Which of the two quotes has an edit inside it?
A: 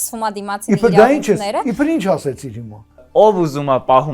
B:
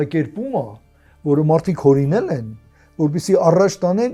A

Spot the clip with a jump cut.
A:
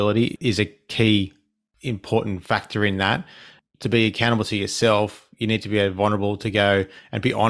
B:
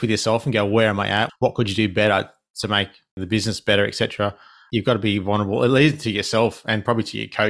B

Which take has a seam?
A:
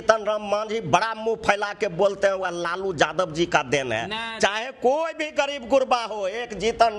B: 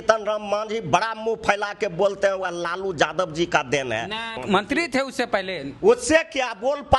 B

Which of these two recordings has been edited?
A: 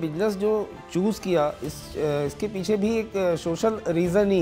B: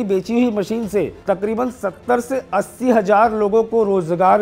B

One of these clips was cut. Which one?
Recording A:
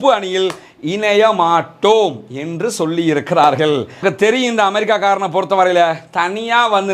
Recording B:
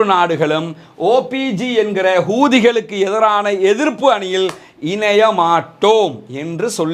A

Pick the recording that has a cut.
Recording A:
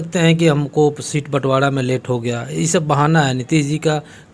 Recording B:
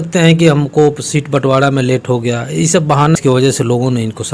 B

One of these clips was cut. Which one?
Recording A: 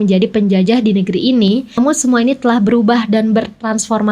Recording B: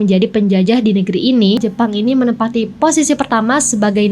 B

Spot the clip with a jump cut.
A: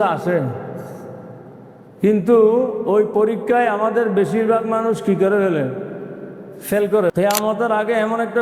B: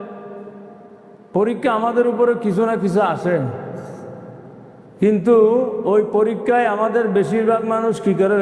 A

